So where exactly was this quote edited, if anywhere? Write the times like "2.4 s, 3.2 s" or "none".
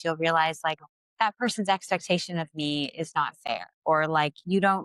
3.7 s